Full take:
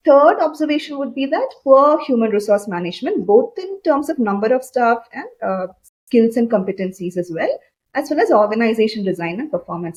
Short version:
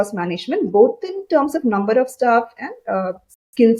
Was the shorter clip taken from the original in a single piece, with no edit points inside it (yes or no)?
yes